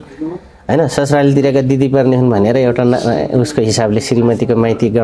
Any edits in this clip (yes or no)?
no